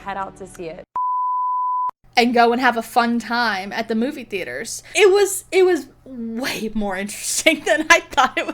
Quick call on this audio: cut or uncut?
cut